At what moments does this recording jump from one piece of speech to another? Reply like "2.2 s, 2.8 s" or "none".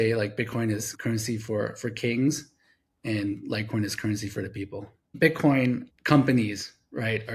0.9 s, 5.1 s